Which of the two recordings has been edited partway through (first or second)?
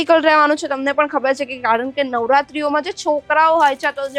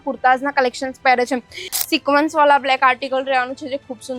second